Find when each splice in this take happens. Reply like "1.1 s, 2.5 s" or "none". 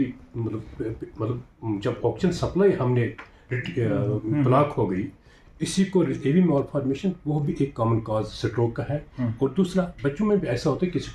6.2 s